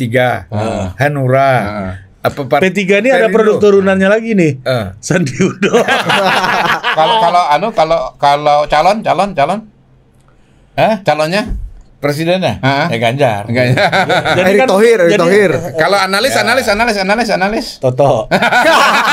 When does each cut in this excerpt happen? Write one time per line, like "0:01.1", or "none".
none